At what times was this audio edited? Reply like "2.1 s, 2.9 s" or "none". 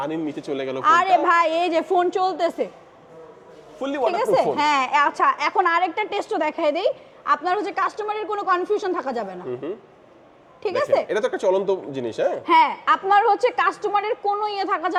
none